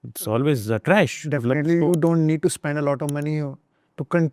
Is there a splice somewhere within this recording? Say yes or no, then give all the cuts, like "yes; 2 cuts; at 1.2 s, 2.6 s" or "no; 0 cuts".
no; 0 cuts